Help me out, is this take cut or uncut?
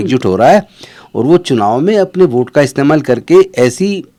uncut